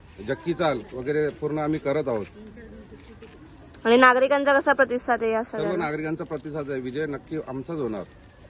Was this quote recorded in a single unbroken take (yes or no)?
yes